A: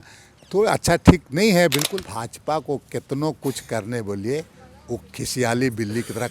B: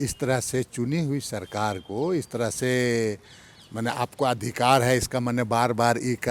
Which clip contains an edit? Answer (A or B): A